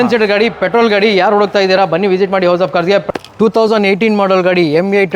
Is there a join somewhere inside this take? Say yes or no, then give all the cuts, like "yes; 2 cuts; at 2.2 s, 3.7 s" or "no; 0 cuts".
yes; 1 cut; at 3.1 s